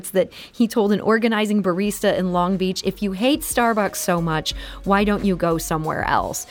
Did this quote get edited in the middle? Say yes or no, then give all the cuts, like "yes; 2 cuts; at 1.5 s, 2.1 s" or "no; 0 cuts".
no; 0 cuts